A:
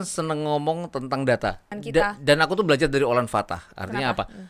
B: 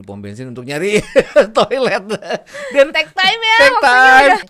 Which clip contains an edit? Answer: A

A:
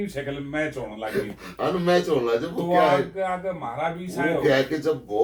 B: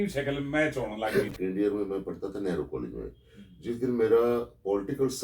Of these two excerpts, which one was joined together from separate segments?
B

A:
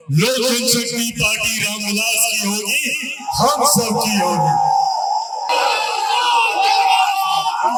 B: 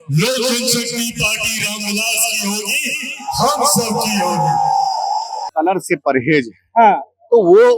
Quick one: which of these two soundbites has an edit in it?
B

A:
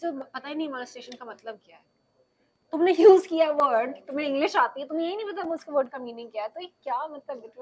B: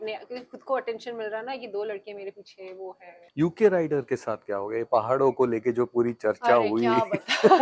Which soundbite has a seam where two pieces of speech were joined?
B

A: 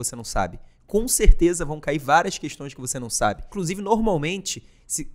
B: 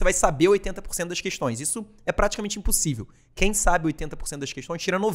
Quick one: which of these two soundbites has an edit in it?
A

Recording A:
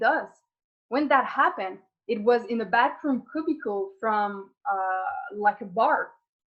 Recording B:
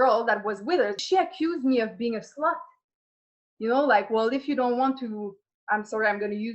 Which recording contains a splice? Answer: B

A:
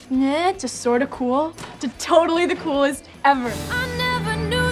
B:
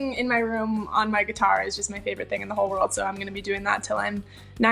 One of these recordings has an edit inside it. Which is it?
A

